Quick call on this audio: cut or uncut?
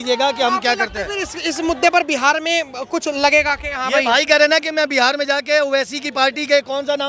uncut